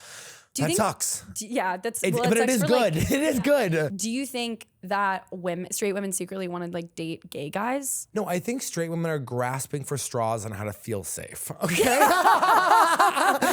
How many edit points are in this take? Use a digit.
2